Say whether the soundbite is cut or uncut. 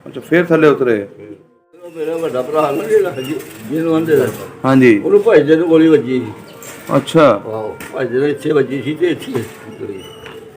cut